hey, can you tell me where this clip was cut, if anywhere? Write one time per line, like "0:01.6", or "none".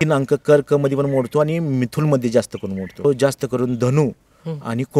0:03.0